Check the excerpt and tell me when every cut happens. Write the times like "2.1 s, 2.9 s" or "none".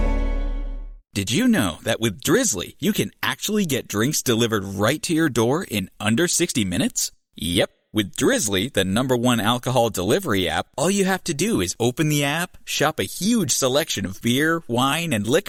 none